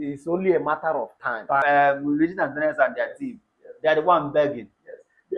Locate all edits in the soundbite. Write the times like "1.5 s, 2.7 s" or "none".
1.6 s